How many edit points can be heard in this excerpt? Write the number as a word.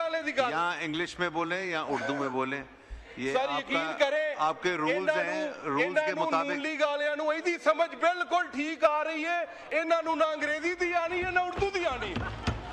zero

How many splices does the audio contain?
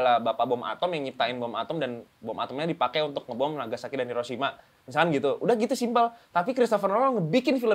zero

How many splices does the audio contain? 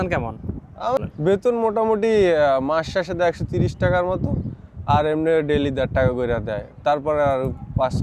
one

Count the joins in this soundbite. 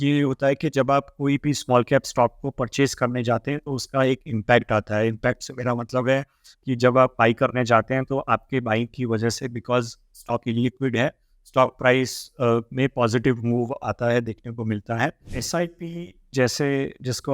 one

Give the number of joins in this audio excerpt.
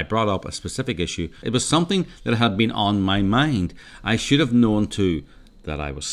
two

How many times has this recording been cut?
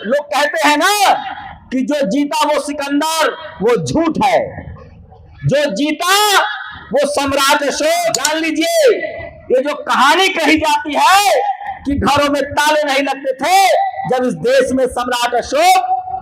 one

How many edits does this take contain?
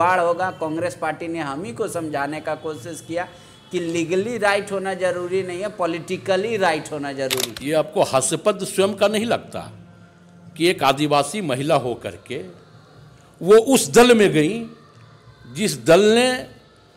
one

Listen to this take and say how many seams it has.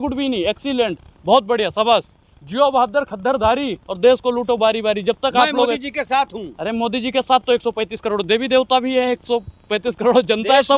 zero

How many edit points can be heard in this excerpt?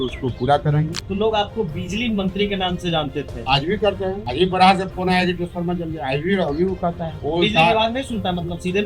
four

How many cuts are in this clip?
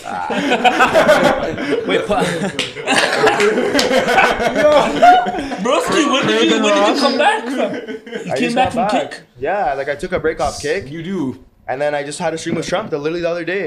zero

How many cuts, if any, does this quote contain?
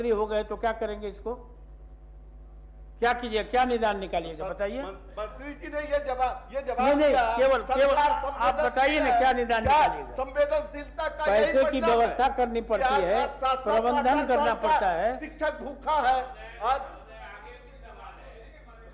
zero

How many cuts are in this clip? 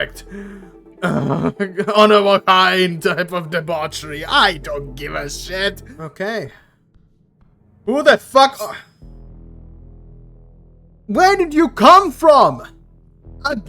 one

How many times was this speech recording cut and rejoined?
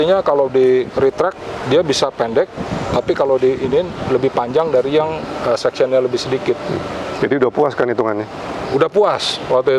zero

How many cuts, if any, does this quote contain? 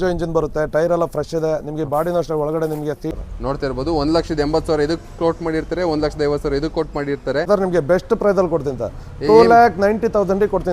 two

